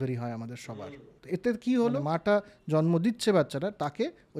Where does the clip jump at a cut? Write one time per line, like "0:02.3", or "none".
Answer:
0:01.1
0:02.0